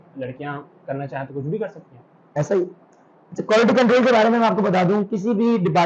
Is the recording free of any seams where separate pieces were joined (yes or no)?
yes